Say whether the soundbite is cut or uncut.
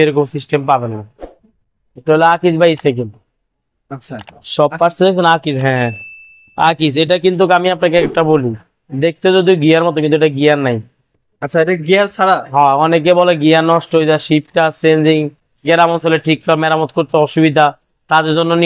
uncut